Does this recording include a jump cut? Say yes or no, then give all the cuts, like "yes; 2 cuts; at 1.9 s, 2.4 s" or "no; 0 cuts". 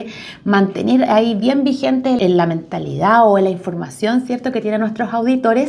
yes; 1 cut; at 2.2 s